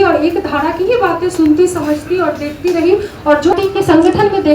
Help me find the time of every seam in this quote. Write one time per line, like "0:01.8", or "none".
0:03.5